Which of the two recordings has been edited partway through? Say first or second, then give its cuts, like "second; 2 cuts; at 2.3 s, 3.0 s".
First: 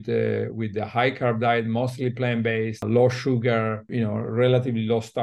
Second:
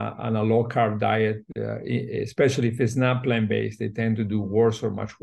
first; 2 cuts; at 2.8 s, 3.8 s